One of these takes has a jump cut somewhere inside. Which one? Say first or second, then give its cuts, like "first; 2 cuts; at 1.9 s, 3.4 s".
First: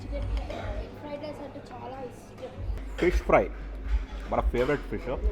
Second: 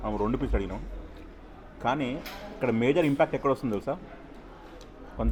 first; 1 cut; at 2.7 s